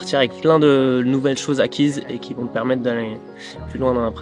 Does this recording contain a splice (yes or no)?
no